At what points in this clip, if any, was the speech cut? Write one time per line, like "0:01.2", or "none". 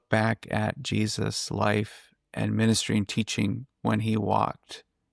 none